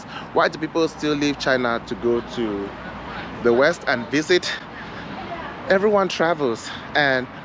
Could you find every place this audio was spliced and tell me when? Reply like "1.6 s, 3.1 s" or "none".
none